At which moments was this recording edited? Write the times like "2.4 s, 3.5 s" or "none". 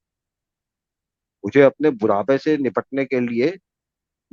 none